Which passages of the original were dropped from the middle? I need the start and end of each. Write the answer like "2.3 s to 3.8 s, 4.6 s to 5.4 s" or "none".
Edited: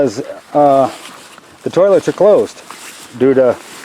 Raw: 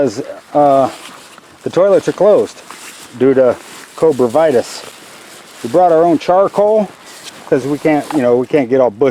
none